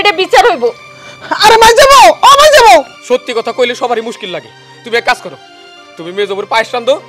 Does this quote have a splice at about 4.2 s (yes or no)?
no